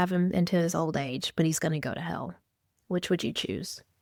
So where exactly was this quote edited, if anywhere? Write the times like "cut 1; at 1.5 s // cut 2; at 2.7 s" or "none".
none